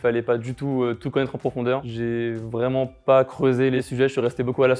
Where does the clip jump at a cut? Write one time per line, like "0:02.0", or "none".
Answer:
0:01.9
0:03.9